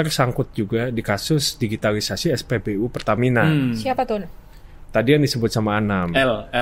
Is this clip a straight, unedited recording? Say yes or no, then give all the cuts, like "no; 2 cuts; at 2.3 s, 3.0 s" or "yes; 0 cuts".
yes; 0 cuts